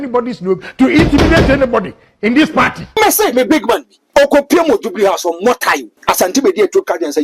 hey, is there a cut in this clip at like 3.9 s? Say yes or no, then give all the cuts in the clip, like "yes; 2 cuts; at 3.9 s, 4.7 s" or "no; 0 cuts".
yes; 3 cuts; at 2.8 s, 3.9 s, 5.9 s